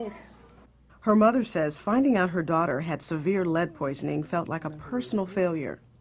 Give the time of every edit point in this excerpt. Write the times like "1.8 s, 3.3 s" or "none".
4.0 s

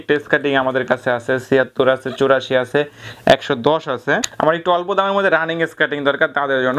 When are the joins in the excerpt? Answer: 4.3 s

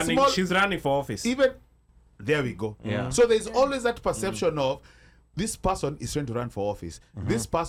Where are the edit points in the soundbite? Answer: none

